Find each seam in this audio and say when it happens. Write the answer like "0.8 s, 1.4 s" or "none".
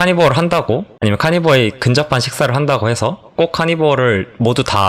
0.9 s, 3.3 s